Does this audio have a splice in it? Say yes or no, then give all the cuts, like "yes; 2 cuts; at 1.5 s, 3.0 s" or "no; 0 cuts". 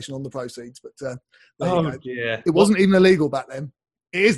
no; 0 cuts